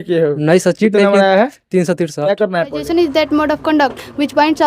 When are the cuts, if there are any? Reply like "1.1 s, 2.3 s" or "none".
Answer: 2.8 s